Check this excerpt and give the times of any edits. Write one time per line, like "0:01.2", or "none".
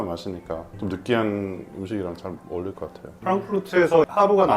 0:03.1